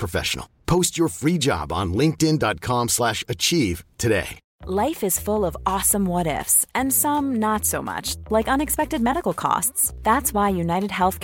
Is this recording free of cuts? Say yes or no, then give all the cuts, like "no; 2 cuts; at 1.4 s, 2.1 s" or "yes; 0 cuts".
yes; 0 cuts